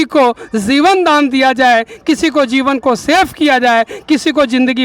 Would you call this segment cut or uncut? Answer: uncut